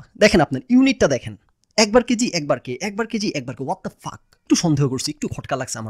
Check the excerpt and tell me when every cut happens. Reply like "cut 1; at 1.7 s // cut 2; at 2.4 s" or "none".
cut 1; at 4.4 s

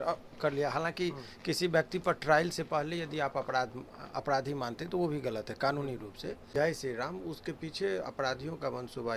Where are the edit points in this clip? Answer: cut 1; at 6.5 s

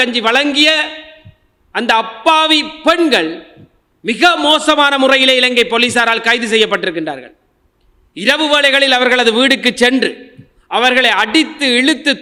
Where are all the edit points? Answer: none

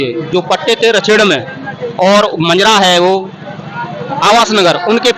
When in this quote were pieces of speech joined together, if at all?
none

